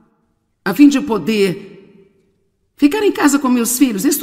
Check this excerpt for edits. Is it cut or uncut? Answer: uncut